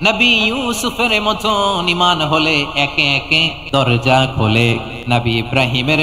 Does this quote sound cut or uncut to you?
cut